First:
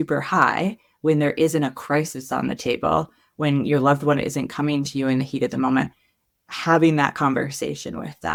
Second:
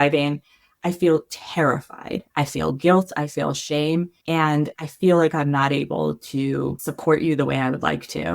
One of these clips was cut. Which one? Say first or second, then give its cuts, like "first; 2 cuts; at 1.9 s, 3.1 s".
second; 3 cuts; at 2.2 s, 4.2 s, 6.9 s